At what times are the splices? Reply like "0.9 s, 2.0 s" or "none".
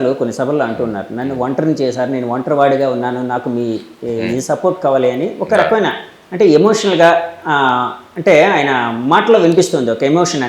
none